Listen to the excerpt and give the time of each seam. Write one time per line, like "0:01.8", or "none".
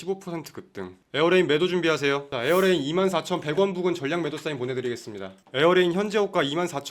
0:02.3